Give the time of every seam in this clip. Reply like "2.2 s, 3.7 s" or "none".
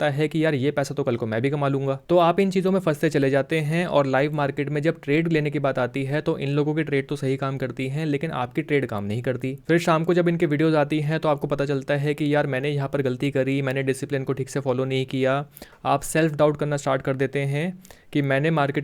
none